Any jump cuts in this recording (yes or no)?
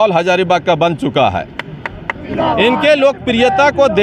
yes